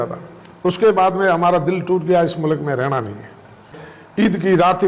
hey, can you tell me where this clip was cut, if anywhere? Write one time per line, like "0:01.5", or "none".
0:03.7

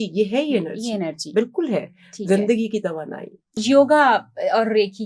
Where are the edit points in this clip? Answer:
0:03.6

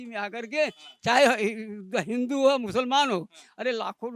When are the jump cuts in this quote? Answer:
none

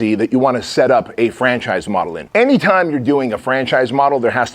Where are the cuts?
0:02.2

